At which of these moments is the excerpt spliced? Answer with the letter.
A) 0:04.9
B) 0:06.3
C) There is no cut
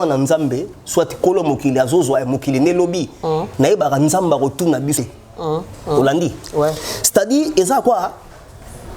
A